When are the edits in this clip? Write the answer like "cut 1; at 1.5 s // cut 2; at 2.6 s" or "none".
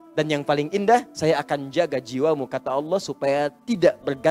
cut 1; at 1.1 s